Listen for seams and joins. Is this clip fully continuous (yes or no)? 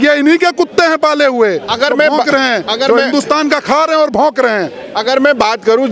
yes